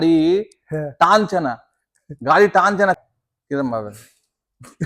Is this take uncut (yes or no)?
no